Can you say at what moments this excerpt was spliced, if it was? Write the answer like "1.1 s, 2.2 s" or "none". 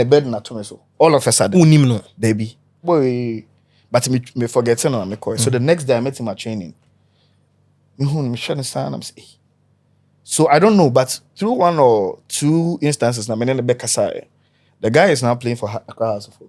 2.8 s